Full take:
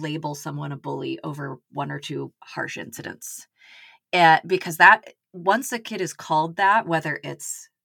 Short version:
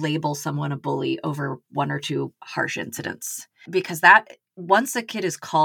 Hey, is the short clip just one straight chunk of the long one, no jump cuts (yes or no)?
no